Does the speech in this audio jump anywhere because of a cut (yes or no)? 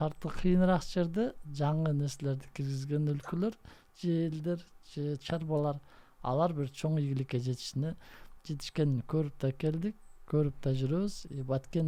no